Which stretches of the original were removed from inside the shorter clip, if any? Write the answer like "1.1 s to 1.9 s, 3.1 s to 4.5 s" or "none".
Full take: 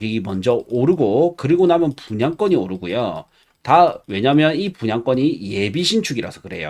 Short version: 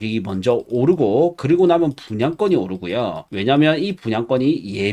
3.3 s to 4.1 s